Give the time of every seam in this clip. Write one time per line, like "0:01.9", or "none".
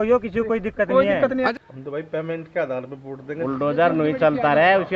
0:01.5
0:03.3